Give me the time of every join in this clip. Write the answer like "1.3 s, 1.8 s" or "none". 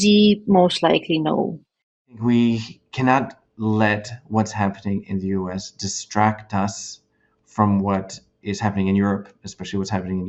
2.2 s

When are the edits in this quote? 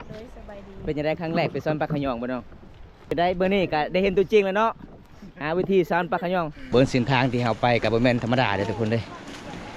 3.1 s, 6.6 s

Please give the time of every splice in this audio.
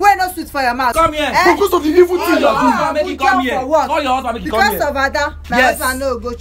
0.9 s

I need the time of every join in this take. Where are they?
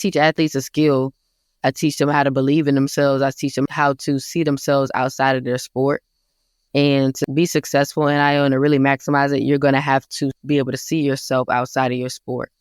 3.7 s, 7.2 s, 10.4 s

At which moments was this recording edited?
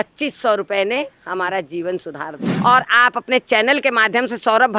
2.5 s

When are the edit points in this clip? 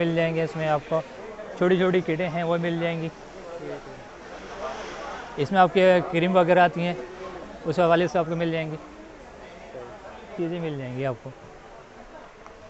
10.3 s

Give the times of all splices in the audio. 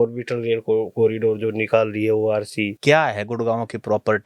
2.7 s

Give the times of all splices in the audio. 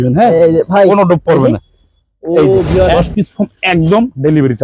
2.9 s

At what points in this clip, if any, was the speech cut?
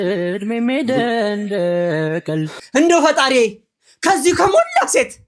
2.5 s

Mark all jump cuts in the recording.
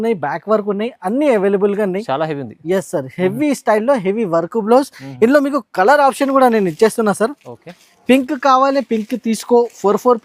none

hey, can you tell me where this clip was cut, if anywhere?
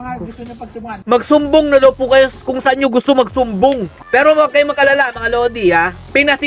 1.0 s, 3.9 s

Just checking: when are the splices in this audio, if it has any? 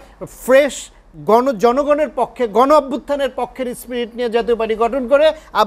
none

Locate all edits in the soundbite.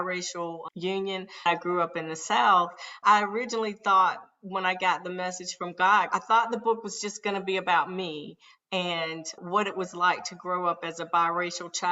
1.4 s, 2.9 s, 6.1 s

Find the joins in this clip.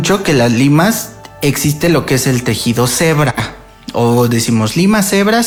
none

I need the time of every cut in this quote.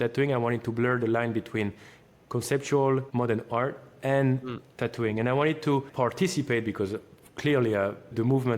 3.1 s, 5.9 s

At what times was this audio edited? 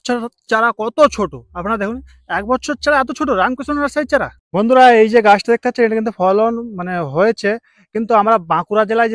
4.4 s

